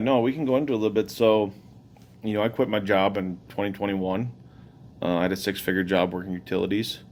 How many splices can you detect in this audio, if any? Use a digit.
0